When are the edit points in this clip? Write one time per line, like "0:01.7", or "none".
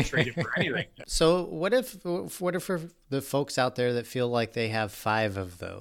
0:01.0